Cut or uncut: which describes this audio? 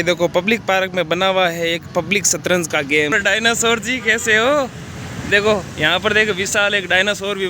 cut